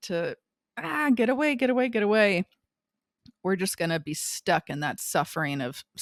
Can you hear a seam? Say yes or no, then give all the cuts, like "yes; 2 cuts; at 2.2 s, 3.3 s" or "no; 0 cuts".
no; 0 cuts